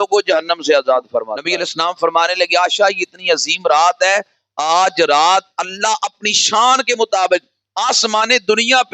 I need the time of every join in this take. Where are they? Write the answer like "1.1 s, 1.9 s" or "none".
1.4 s